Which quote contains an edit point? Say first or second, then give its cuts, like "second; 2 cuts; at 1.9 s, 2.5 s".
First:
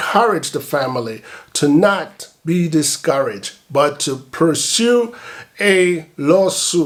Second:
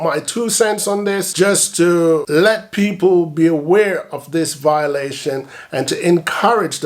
second; 2 cuts; at 1.3 s, 2.3 s